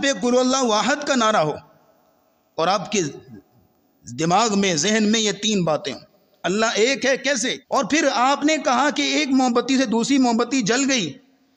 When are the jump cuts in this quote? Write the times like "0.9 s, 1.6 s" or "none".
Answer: 7.6 s